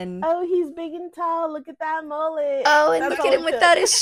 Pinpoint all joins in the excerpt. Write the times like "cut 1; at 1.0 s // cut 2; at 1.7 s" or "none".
none